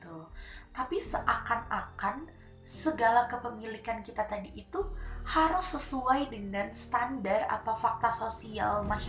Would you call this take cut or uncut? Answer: uncut